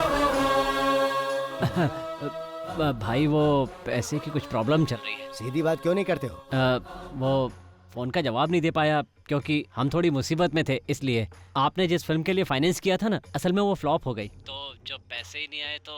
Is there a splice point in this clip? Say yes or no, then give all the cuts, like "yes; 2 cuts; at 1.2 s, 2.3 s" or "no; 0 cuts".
yes; 1 cut; at 1.5 s